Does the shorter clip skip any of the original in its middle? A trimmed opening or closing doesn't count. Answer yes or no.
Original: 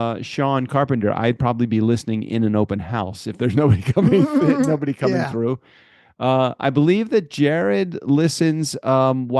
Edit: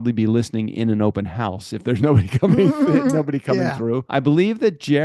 yes